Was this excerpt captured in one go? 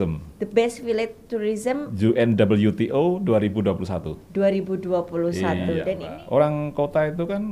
no; 1 cut; at 6.1 s

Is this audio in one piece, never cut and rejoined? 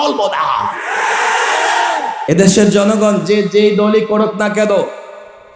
no; 1 cut; at 2.2 s

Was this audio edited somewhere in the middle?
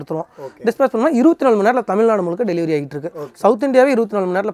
no; 0 cuts

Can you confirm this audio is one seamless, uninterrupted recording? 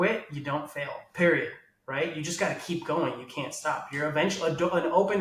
yes; 0 cuts

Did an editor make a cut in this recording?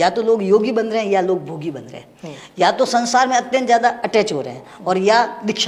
no; 0 cuts

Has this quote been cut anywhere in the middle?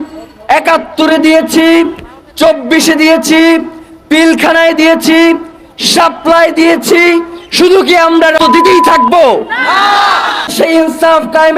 yes; 2 cuts; at 8.5 s, 10.5 s

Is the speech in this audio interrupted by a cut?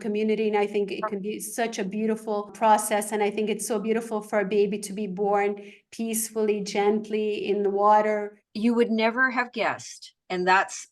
yes; 1 cut; at 8.4 s

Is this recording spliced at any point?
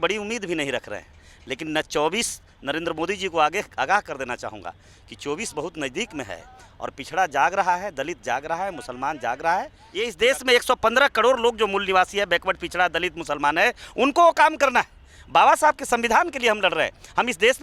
yes; 1 cut; at 10.1 s

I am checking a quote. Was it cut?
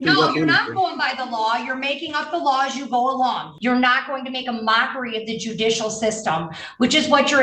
yes; 1 cut; at 3.5 s

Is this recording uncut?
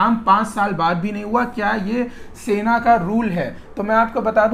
yes; 0 cuts

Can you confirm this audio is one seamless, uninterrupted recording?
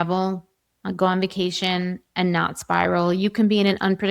yes; 0 cuts

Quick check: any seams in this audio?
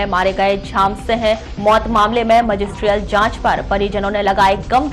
no; 0 cuts

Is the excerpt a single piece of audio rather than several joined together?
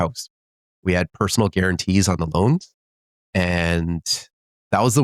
no; 1 cut; at 2.8 s

